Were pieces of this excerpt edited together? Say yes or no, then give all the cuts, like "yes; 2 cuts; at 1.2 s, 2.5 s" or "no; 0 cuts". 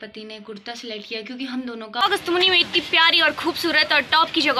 yes; 1 cut; at 2.0 s